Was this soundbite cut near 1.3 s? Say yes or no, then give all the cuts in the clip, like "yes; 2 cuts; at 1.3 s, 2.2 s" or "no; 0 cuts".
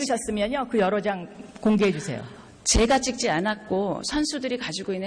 no; 1 cut; at 3.1 s